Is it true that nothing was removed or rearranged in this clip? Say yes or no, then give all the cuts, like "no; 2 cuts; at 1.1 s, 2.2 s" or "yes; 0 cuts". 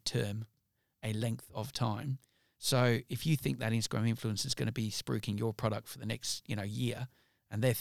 yes; 0 cuts